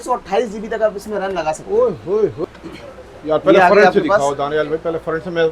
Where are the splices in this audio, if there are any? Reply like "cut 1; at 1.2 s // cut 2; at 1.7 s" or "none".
cut 1; at 2.4 s